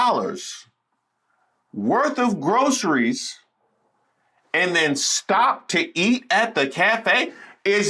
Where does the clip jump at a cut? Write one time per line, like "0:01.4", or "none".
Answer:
none